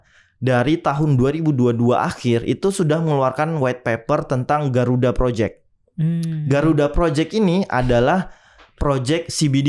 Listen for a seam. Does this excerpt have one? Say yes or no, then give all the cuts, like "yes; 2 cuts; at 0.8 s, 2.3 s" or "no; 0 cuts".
no; 0 cuts